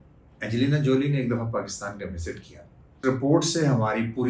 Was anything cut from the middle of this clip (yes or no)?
yes